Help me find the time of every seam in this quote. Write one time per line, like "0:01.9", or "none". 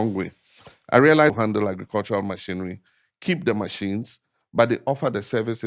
0:01.4